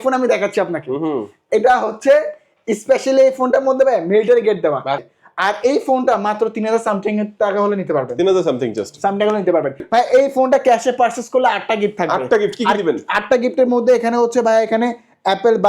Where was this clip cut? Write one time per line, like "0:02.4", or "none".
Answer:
0:05.0
0:09.8